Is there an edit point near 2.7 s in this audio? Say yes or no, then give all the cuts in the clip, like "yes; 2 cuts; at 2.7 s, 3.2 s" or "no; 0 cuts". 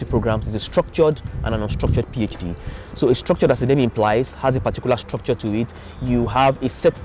no; 0 cuts